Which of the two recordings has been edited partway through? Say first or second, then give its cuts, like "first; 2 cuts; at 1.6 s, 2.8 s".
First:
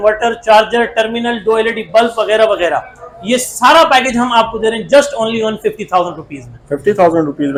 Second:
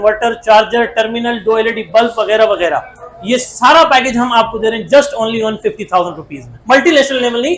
second; 1 cut; at 6.5 s